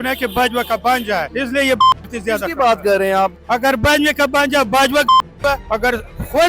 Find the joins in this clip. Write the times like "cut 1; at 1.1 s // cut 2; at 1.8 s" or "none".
cut 1; at 1.3 s // cut 2; at 3.4 s // cut 3; at 5.6 s